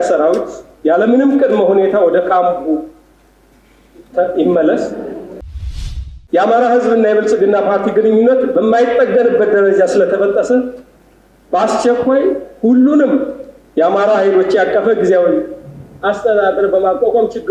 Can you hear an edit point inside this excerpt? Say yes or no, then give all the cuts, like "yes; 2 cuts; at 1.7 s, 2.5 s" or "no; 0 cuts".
yes; 1 cut; at 5.8 s